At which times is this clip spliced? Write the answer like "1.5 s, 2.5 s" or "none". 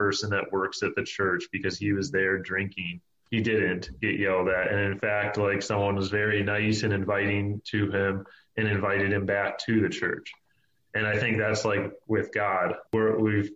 none